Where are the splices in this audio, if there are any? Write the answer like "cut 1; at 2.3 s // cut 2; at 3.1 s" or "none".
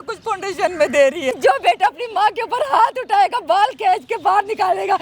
cut 1; at 1.4 s

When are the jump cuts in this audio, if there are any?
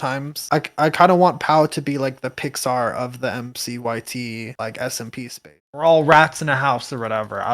cut 1; at 5.5 s

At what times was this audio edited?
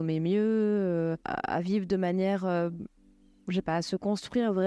cut 1; at 1.3 s

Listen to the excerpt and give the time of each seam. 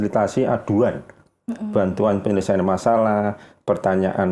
none

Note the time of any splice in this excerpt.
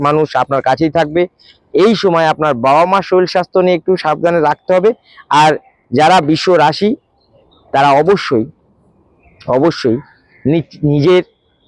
none

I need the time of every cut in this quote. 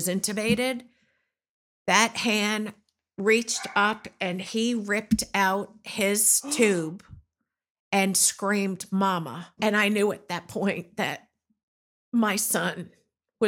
cut 1; at 9.5 s

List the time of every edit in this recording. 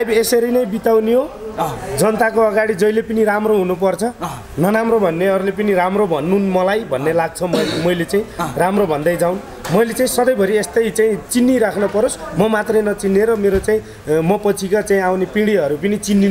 none

